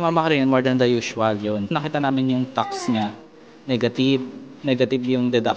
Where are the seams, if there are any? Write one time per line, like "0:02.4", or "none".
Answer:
0:01.7